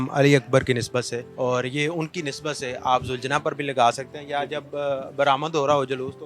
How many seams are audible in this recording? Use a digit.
1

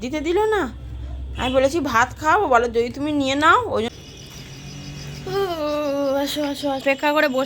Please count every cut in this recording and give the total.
1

